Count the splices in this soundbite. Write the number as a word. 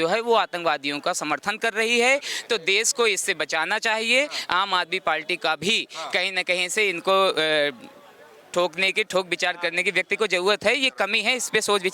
zero